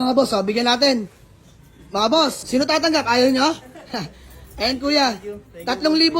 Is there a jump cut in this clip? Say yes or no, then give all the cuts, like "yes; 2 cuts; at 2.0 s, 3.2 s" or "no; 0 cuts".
yes; 1 cut; at 2.4 s